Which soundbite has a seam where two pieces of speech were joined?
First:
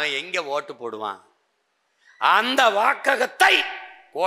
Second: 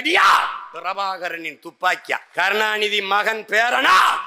second; 1 cut; at 2.3 s

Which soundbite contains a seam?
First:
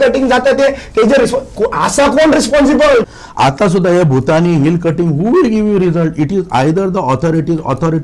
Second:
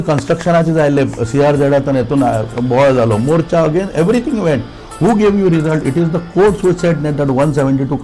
first; 1 cut; at 3.2 s

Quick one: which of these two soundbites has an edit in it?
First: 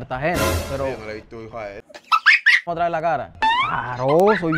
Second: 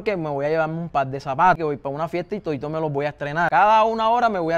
first; 1 cut; at 2.7 s

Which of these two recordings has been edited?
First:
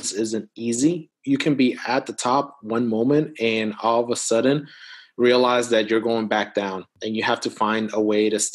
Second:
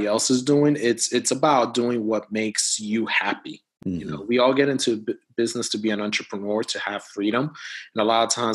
first; 2 cuts; at 1.1 s, 6.9 s

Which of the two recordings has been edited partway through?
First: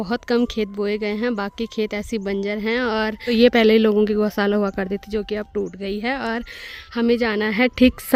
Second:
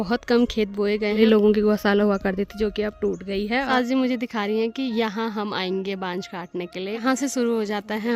second; 3 cuts; at 1.2 s, 3.7 s, 7.0 s

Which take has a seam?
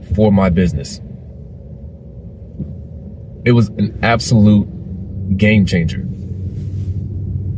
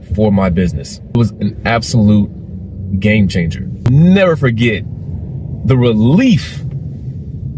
second; 2 cuts; at 1.2 s, 3.9 s

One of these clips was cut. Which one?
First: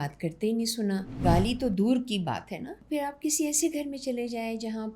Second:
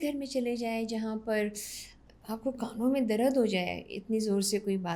first; 2 cuts; at 1.2 s, 2.8 s

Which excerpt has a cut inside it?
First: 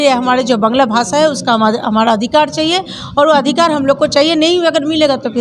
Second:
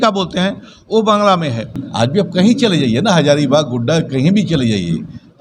second; 1 cut; at 1.8 s

